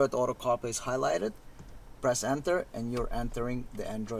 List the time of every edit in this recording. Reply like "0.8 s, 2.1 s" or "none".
none